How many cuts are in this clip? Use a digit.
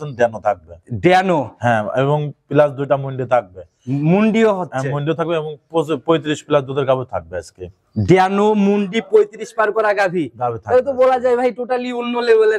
0